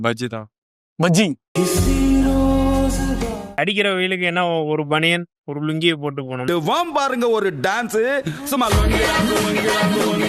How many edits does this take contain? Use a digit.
1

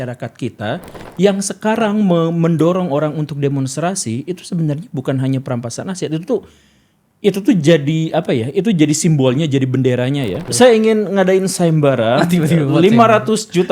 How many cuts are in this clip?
2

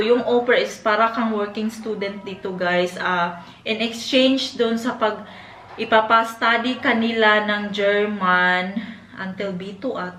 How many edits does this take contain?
0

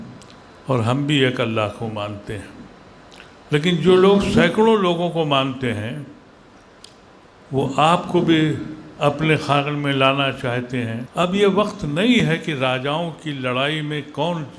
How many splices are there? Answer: 1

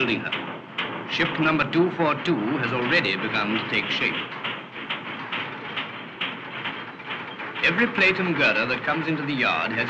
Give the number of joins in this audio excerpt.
1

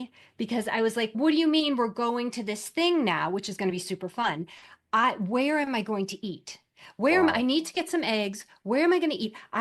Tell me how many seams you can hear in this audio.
1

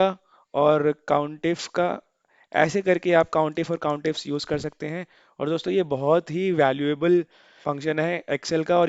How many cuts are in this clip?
1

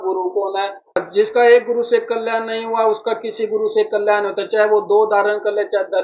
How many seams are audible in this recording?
1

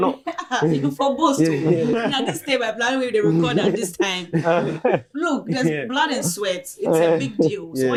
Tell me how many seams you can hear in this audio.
0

